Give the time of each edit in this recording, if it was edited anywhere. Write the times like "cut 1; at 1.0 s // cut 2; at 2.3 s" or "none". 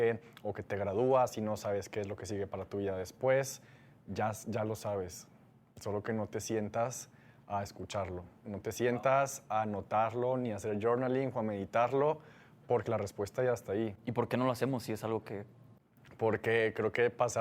none